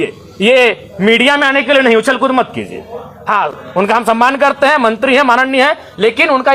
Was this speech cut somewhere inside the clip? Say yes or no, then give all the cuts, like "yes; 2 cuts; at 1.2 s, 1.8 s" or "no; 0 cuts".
no; 0 cuts